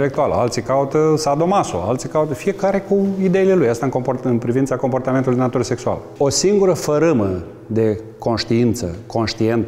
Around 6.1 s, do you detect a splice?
yes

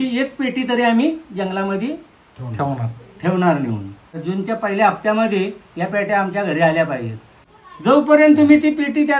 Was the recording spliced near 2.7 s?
no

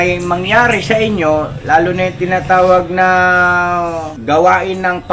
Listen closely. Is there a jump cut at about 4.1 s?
yes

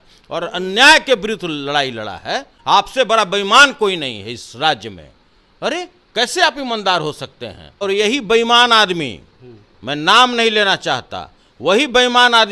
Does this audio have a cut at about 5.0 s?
no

